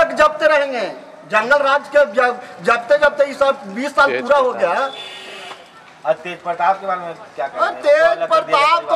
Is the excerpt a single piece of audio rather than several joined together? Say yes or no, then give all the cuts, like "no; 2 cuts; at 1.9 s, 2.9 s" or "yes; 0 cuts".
yes; 0 cuts